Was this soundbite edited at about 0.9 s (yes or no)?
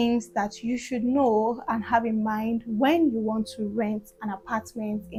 no